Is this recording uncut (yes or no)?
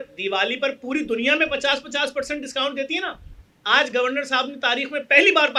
yes